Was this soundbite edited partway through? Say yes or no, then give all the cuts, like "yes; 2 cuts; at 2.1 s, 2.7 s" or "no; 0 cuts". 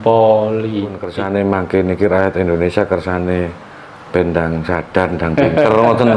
yes; 1 cut; at 1.1 s